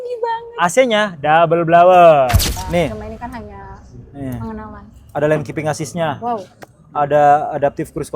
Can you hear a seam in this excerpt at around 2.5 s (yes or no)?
yes